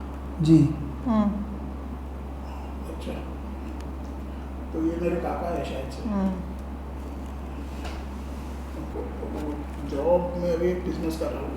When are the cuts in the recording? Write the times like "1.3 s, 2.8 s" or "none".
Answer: 8.9 s

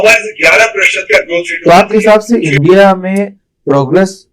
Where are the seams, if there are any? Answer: 1.5 s

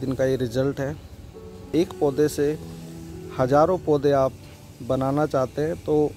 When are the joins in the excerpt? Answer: 1.7 s

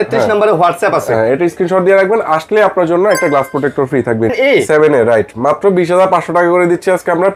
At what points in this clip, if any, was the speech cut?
4.3 s

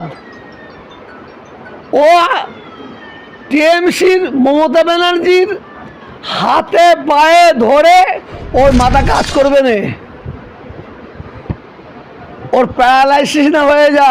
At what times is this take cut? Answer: 8.3 s

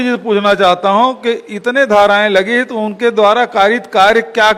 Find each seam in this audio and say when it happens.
none

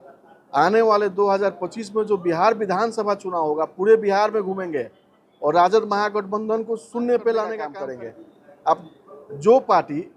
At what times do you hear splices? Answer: 7.8 s

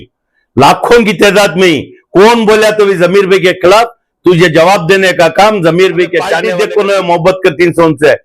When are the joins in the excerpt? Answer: 6.4 s

